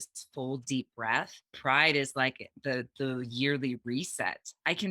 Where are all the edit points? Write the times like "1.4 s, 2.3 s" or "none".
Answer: 1.6 s